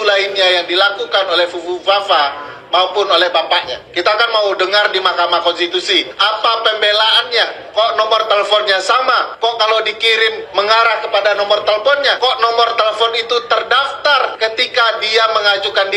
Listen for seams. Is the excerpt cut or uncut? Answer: cut